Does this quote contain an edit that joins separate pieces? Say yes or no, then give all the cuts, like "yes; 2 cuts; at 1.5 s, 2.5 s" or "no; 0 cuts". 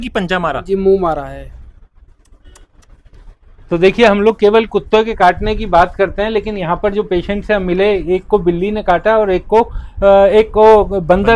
no; 0 cuts